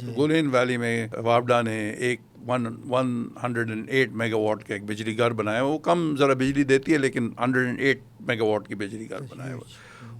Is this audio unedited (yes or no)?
no